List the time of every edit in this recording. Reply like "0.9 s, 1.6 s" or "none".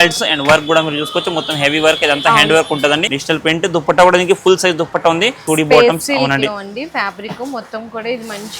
3.1 s, 5.4 s